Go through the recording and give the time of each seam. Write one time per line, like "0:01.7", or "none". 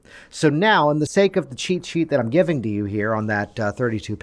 0:01.1